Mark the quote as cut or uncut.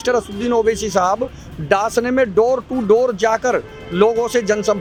uncut